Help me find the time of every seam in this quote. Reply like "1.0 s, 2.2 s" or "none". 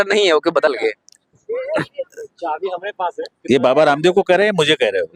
none